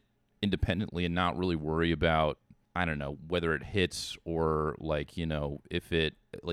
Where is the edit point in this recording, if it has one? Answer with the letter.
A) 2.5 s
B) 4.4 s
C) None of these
A